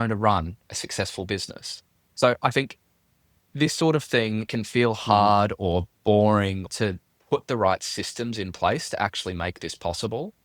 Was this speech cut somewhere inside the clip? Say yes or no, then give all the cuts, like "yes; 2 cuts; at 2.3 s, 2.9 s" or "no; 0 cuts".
yes; 2 cuts; at 4.5 s, 6.7 s